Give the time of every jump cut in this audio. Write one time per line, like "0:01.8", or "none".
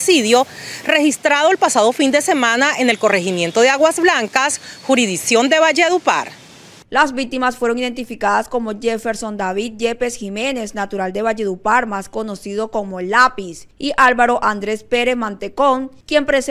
none